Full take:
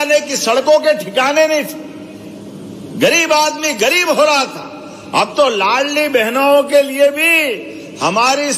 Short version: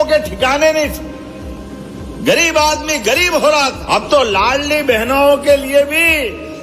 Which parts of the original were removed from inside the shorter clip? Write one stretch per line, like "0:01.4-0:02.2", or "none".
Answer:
0:04.5-0:05.0